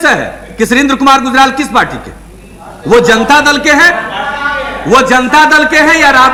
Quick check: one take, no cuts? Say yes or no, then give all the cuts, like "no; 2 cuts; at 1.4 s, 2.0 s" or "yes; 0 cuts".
yes; 0 cuts